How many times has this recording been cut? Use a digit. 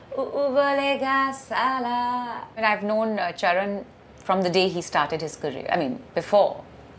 1